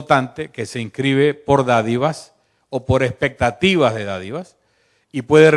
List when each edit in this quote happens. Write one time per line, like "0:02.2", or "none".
0:02.8